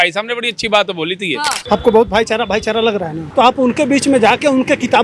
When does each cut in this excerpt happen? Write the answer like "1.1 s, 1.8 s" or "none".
1.6 s, 3.2 s